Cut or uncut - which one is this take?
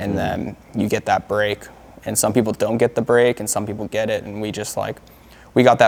uncut